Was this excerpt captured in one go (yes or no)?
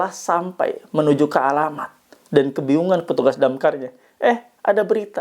yes